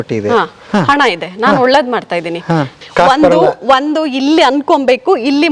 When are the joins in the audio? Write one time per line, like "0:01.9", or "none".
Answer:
0:02.7